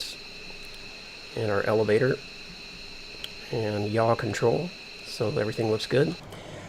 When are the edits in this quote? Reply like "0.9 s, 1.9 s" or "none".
none